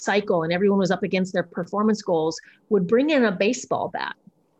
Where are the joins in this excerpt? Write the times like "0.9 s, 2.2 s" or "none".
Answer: none